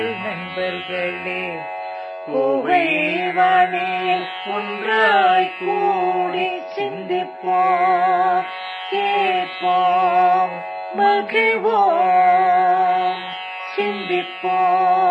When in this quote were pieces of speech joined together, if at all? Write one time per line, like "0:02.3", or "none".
none